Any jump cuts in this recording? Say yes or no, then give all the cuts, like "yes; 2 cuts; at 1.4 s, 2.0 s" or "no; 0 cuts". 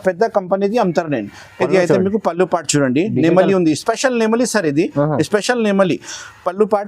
no; 0 cuts